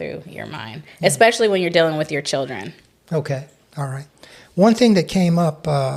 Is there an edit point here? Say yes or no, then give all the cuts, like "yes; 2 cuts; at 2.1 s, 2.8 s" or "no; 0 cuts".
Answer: no; 0 cuts